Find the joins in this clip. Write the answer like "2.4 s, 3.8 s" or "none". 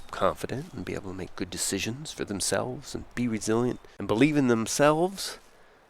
3.9 s